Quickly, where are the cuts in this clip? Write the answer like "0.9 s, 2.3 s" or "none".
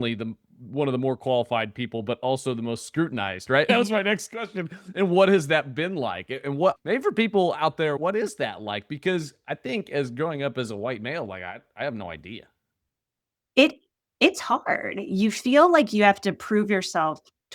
3.7 s, 6.8 s, 8.0 s